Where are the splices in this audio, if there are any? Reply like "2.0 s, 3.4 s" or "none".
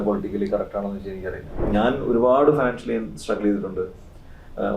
1.7 s